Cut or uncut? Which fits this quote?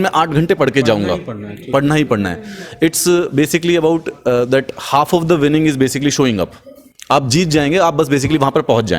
uncut